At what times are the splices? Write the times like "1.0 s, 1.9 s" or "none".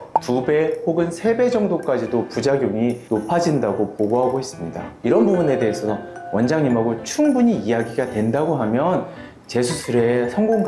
4.9 s